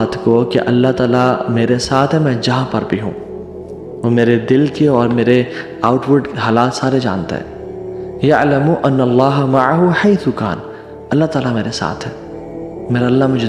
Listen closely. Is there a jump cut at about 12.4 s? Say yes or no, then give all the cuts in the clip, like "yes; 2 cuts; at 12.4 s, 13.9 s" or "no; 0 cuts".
no; 0 cuts